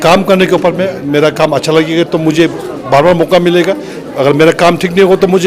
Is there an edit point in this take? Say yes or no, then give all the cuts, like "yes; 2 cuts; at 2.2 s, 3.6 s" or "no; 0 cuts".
no; 0 cuts